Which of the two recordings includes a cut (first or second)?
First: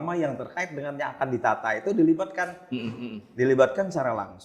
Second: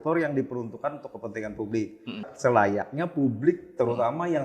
second